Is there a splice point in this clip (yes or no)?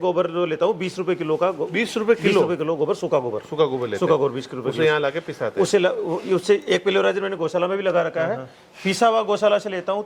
no